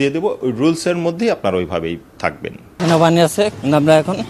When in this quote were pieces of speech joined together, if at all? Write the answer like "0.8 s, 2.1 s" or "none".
2.6 s